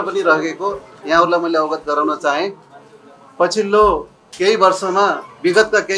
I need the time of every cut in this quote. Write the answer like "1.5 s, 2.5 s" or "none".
none